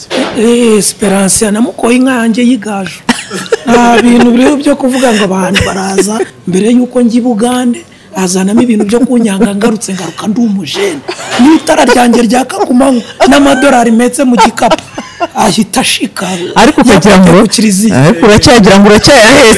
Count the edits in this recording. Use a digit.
1